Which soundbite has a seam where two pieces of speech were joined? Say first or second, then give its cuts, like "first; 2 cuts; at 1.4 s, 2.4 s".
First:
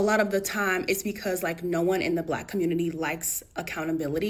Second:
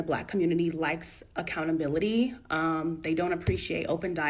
second; 1 cut; at 3.3 s